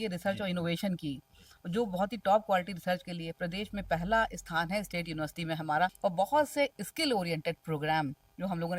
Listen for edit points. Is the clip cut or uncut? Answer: cut